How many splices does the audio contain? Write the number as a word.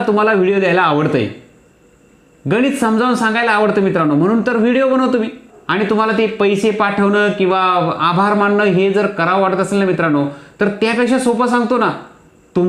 one